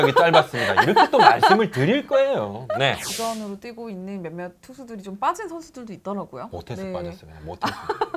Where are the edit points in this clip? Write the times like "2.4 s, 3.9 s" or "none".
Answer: 3.1 s